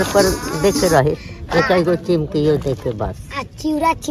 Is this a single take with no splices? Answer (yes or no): yes